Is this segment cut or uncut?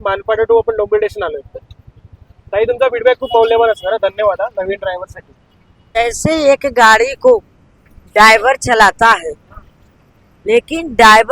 cut